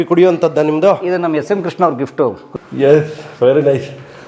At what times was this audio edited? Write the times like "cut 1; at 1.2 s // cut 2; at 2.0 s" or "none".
cut 1; at 2.4 s